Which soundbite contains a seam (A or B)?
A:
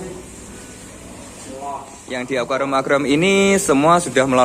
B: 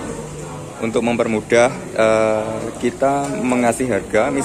A